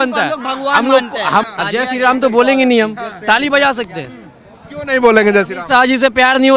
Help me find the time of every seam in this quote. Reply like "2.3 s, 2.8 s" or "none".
1.5 s